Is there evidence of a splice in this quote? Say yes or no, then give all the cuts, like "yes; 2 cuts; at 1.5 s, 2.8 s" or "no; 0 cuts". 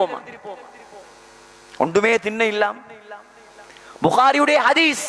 no; 0 cuts